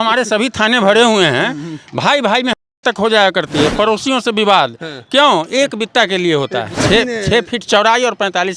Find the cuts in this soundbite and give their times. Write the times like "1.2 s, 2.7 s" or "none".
6.7 s